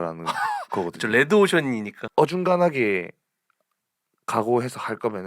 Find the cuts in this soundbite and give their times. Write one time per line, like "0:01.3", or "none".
0:01.9